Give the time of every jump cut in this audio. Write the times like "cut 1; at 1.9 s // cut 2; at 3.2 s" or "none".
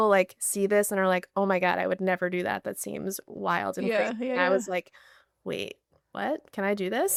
none